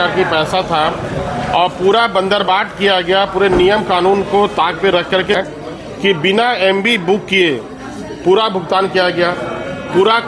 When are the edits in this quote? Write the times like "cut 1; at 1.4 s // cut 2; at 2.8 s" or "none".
cut 1; at 5.4 s